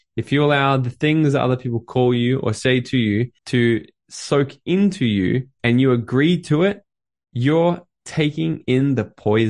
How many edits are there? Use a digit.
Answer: 2